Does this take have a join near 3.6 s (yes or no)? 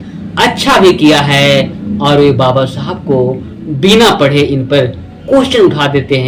no